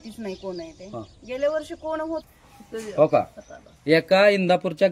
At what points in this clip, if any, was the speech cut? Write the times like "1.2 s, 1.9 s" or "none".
2.2 s